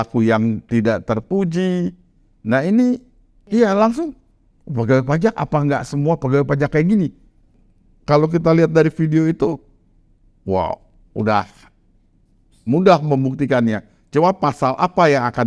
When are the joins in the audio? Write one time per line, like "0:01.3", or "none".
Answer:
0:03.5
0:07.5